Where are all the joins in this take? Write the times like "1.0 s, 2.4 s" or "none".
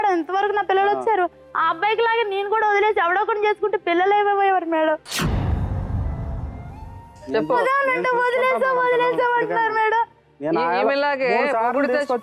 none